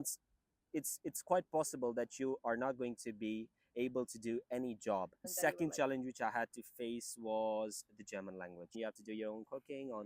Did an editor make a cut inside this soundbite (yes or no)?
yes